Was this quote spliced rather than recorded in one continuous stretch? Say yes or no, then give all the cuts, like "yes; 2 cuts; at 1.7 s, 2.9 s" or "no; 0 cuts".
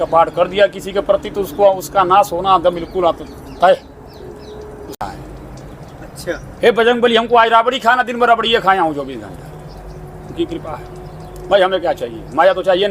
yes; 1 cut; at 5.0 s